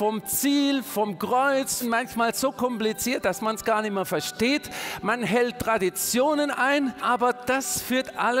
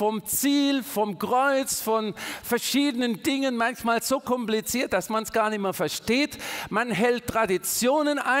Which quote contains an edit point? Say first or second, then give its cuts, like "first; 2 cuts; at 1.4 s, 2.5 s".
first; 2 cuts; at 1.8 s, 7.0 s